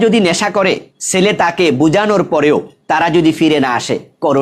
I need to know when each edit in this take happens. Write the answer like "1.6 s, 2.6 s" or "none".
0.9 s, 2.7 s